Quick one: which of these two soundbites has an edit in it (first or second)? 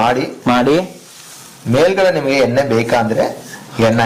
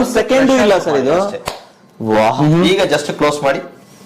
second